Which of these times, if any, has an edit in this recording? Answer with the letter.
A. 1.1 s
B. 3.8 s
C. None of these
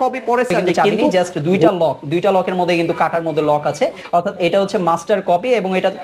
A